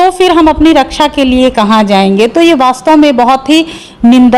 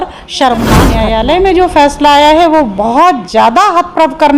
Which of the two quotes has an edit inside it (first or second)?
second